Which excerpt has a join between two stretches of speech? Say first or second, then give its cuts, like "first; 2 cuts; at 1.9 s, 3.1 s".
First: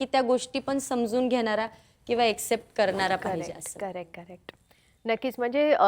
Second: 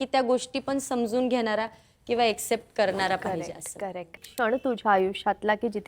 second; 1 cut; at 4.2 s